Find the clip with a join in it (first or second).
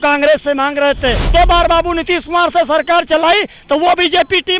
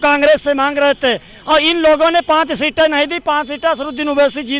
first